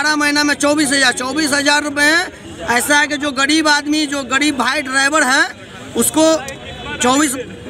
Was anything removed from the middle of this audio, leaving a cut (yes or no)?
no